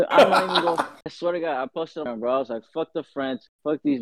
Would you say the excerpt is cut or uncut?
uncut